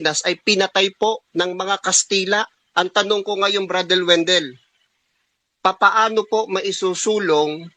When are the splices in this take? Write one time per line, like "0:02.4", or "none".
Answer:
0:02.6

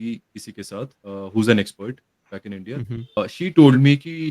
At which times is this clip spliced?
0:01.0
0:03.2

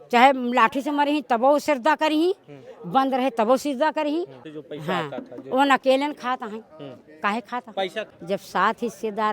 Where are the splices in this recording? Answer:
0:04.4
0:08.1

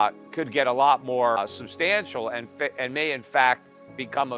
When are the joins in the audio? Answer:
0:01.4

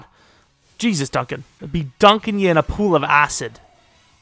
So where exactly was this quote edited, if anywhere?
0:01.5

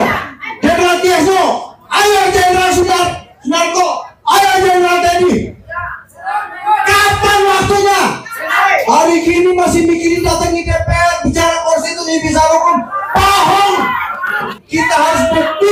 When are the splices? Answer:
0:08.6
0:14.6

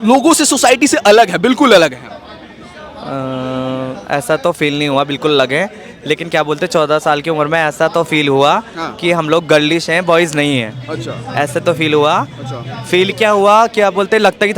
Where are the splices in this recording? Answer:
none

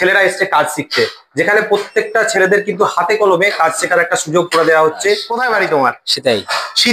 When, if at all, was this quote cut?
0:05.3

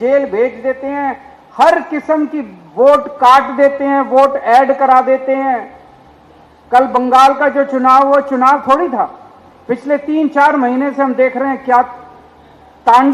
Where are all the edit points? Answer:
none

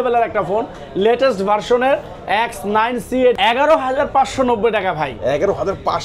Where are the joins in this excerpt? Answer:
0:03.3

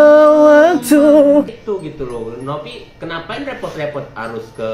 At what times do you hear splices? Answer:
0:01.5

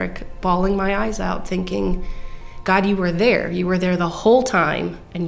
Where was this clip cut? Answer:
none

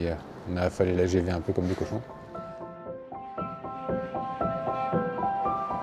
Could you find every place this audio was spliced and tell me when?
0:02.1

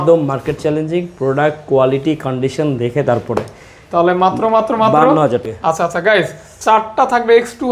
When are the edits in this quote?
0:05.5

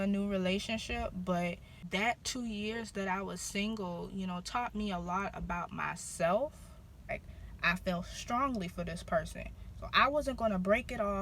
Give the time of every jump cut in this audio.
0:01.7
0:07.1

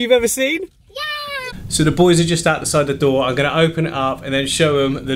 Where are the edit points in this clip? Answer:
0:01.5

